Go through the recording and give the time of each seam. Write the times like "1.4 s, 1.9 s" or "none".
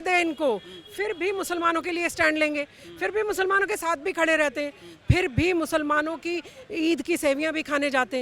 none